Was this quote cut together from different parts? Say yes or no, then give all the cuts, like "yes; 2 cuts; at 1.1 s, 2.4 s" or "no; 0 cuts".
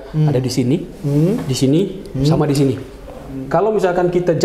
yes; 1 cut; at 3.3 s